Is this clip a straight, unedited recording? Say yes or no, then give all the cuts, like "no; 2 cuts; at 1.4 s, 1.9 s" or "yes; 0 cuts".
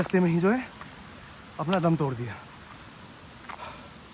yes; 0 cuts